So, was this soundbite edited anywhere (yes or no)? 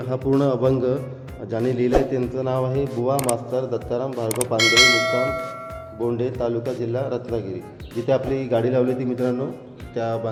no